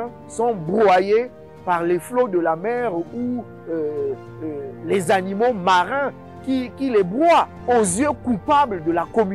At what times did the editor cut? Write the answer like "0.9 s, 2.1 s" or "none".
7.6 s